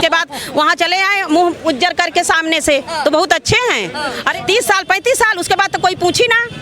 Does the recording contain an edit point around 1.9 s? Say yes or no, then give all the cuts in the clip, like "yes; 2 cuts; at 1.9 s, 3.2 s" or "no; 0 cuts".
no; 1 cut; at 4.3 s